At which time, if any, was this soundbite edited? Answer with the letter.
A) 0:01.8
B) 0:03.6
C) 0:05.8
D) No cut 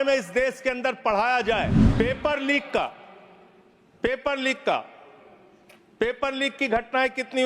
A